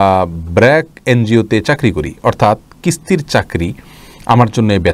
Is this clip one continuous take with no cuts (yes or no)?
yes